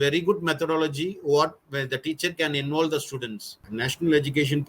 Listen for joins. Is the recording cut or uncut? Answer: cut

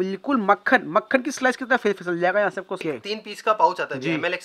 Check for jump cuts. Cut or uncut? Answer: cut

